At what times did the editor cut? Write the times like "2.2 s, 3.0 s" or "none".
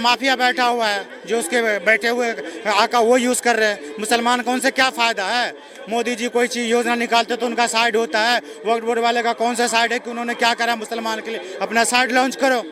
none